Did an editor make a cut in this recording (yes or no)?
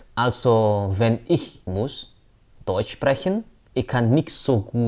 yes